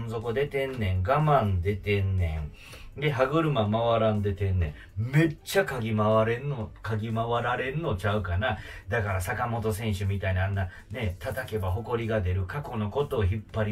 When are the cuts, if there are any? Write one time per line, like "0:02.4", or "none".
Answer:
none